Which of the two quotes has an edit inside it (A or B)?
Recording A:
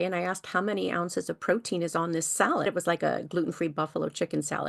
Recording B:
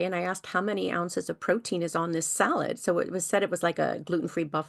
A